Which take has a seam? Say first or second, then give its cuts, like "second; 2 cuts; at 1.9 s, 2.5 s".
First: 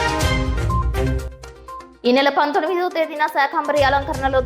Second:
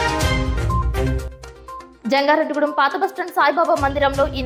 first; 1 cut; at 1.9 s